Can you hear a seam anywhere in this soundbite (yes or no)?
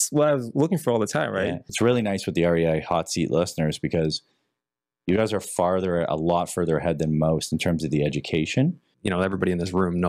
yes